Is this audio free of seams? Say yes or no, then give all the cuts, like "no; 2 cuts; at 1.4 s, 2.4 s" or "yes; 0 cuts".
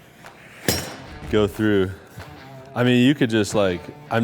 no; 1 cut; at 1.1 s